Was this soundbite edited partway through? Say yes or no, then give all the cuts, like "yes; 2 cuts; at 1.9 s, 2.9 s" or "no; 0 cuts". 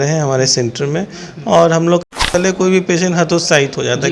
yes; 1 cut; at 2.0 s